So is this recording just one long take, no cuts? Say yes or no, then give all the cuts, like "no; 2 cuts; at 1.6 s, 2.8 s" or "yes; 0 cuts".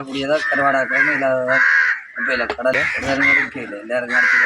no; 1 cut; at 2.8 s